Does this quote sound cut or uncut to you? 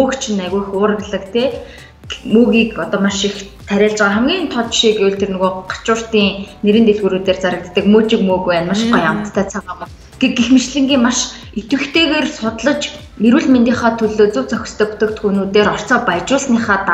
uncut